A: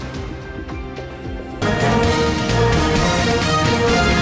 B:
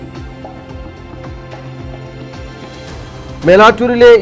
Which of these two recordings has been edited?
A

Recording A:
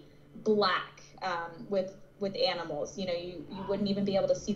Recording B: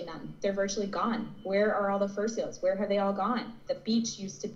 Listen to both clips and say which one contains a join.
B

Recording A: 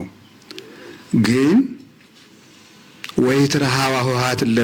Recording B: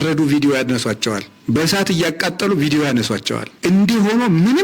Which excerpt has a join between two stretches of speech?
B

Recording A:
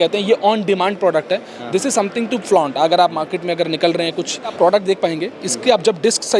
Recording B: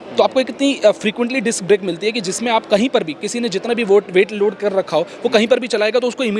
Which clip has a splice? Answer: A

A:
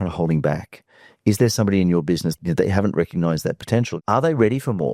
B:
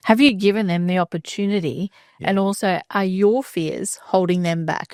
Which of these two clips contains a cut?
A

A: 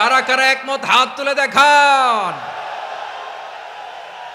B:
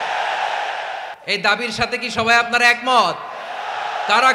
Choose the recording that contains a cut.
B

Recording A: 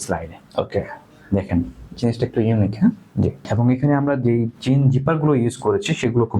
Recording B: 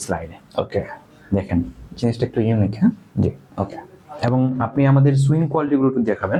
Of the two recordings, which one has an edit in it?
A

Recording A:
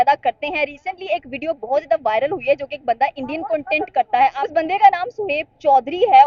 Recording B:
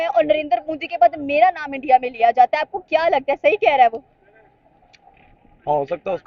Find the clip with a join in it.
A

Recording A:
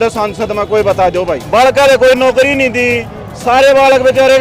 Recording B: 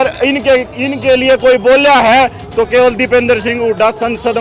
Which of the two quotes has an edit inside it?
A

